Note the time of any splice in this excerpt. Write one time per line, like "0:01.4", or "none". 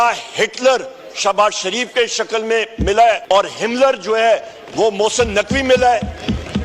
0:03.2